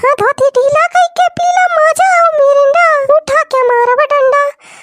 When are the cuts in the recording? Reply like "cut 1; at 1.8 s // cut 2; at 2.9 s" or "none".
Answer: cut 1; at 3.0 s